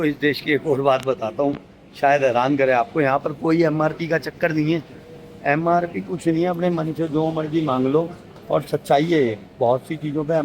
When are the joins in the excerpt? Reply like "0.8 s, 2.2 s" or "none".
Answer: none